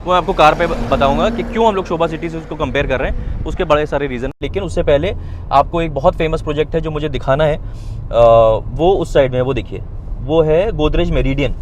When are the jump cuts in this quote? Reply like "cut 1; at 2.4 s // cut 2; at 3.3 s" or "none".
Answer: cut 1; at 4.4 s